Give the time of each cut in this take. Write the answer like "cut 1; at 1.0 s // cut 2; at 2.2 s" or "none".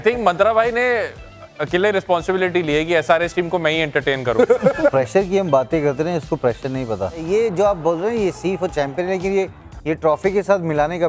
cut 1; at 4.9 s // cut 2; at 7.3 s